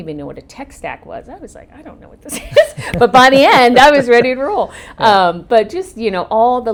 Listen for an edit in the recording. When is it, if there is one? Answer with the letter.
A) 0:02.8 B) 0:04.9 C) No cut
C